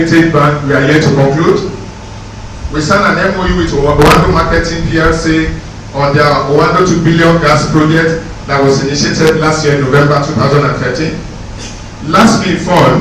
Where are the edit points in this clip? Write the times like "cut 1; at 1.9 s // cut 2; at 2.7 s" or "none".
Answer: none